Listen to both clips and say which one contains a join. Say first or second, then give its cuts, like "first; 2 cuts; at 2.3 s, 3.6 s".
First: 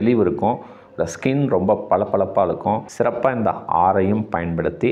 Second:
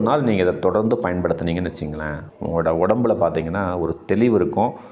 first; 1 cut; at 2.9 s